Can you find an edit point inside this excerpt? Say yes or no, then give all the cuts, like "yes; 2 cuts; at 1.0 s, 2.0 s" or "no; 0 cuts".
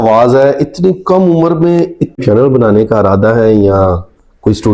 yes; 1 cut; at 2.2 s